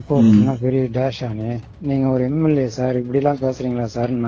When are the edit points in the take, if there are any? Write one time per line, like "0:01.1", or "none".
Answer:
0:01.7